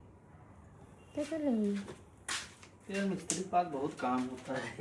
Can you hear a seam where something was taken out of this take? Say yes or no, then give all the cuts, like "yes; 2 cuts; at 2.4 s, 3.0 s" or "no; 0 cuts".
no; 0 cuts